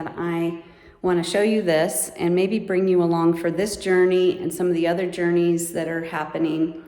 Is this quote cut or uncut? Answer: uncut